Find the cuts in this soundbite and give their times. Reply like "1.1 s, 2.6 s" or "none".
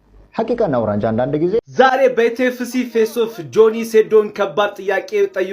1.7 s